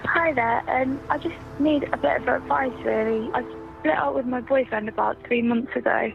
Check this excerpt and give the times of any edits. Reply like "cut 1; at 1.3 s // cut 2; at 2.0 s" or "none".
cut 1; at 3.3 s